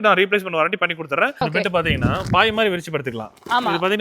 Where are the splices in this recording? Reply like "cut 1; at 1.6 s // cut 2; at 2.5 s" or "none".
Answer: cut 1; at 1.3 s